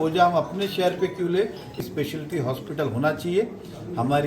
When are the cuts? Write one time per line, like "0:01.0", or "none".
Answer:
0:01.7